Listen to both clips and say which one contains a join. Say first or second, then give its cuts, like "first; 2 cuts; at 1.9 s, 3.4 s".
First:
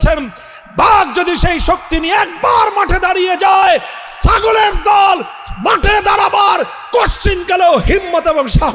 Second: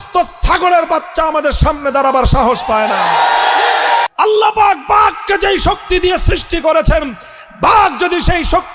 second; 1 cut; at 4.1 s